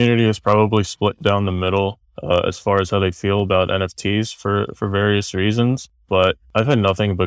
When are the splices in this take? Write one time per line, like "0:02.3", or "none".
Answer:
none